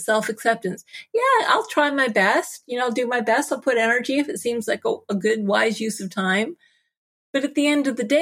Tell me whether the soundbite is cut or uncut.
uncut